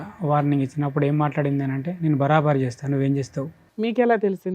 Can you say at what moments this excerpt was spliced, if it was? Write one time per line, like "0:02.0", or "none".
0:03.6